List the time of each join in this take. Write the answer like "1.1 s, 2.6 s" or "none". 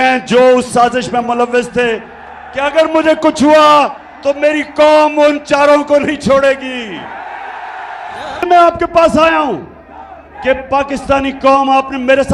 8.4 s